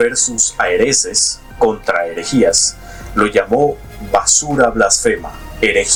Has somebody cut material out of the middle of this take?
no; 0 cuts

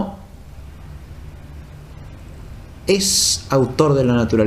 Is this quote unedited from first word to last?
yes; 0 cuts

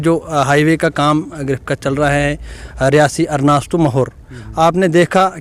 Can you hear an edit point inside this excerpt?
no; 0 cuts

